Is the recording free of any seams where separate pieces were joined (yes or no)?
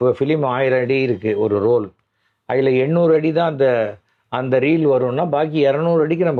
yes